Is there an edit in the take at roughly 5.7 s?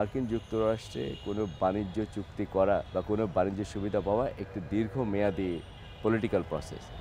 no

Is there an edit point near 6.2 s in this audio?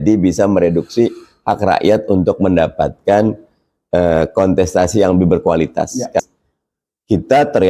yes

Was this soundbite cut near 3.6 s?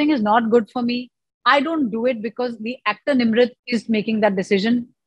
yes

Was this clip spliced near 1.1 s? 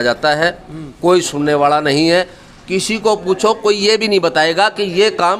no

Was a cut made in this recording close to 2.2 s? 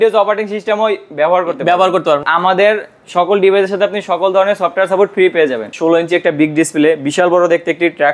yes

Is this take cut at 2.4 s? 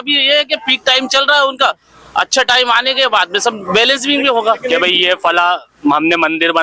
no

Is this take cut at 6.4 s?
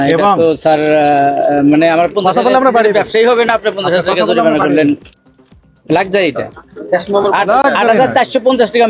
no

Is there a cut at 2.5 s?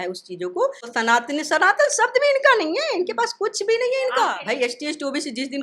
no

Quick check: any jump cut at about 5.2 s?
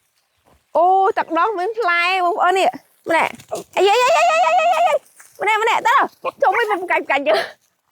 no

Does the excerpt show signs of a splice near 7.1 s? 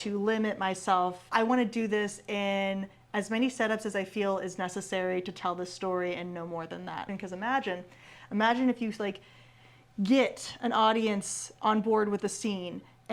yes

